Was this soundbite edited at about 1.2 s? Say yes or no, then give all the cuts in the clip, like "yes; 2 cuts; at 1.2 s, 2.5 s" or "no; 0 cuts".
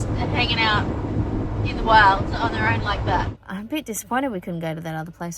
no; 1 cut; at 3.3 s